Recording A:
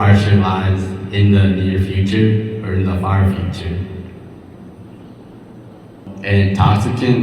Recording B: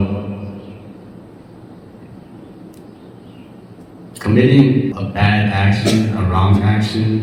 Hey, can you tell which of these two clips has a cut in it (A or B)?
A